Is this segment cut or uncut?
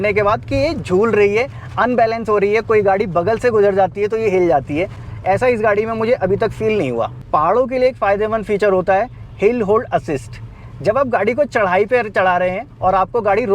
uncut